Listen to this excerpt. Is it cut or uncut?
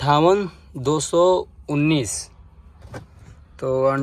uncut